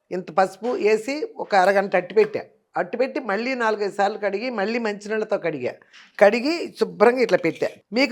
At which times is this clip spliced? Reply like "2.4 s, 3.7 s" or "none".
none